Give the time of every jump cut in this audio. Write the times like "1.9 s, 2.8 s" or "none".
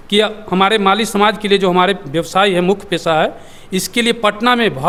none